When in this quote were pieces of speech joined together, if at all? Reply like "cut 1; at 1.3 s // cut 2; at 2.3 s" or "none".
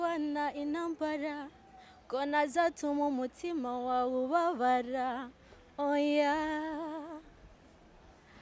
none